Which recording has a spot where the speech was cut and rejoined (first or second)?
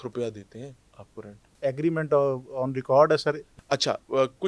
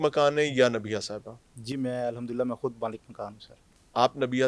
first